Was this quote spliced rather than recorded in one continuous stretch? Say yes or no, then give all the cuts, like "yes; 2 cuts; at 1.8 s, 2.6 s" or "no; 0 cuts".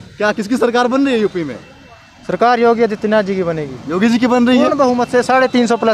no; 0 cuts